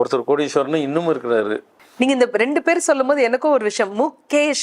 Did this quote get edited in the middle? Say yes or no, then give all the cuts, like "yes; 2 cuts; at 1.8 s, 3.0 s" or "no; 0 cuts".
yes; 1 cut; at 1.7 s